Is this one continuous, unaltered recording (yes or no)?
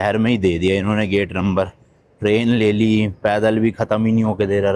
yes